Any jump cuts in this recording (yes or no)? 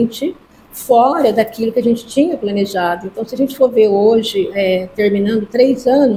no